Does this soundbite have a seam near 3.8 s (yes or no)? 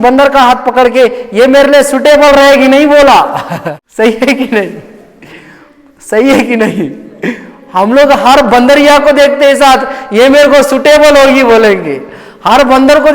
yes